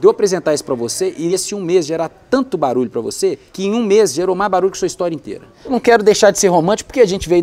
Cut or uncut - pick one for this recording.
cut